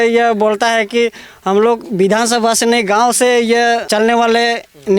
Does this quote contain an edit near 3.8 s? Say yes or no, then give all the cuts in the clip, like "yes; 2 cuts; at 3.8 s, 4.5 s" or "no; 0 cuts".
yes; 1 cut; at 3.8 s